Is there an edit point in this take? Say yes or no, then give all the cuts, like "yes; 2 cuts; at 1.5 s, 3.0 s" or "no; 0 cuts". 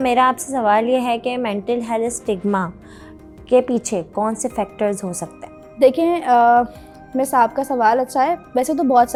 no; 0 cuts